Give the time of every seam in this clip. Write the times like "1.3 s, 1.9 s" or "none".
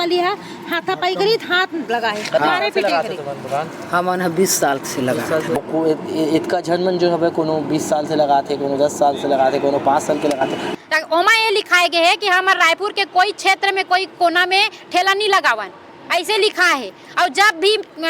5.6 s, 10.7 s